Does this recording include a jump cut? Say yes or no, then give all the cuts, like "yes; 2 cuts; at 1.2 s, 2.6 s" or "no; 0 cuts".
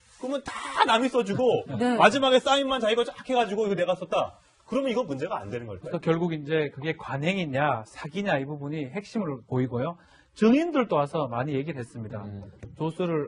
no; 0 cuts